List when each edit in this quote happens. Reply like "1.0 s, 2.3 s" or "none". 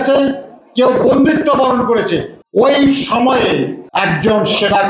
none